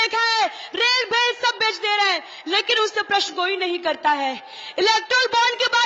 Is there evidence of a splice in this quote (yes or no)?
no